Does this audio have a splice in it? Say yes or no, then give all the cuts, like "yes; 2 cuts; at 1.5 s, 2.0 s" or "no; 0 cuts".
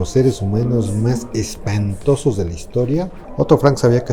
yes; 1 cut; at 3.2 s